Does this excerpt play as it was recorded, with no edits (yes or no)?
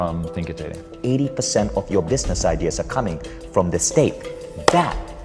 no